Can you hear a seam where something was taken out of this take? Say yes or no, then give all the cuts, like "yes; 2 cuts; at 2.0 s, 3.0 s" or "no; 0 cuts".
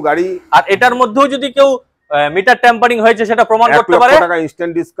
no; 0 cuts